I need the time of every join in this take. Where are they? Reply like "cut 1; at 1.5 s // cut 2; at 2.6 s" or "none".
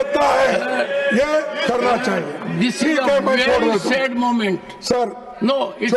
none